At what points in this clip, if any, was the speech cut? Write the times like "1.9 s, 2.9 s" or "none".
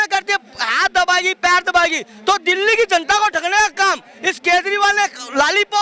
none